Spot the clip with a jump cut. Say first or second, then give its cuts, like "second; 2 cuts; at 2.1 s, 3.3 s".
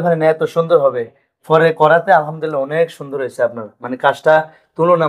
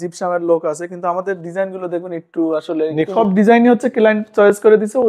second; 1 cut; at 3.1 s